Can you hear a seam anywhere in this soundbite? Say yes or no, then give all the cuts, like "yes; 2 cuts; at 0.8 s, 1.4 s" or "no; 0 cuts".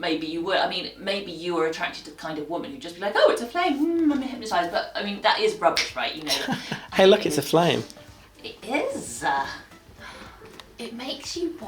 no; 0 cuts